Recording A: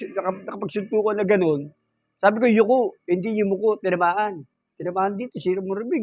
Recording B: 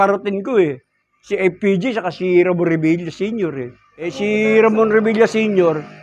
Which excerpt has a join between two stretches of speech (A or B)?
B